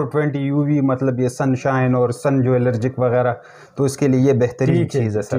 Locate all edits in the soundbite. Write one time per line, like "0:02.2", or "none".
none